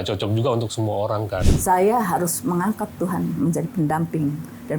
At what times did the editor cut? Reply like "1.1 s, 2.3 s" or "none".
1.5 s